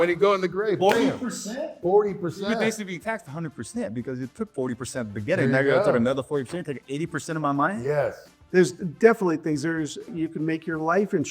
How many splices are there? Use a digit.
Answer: 2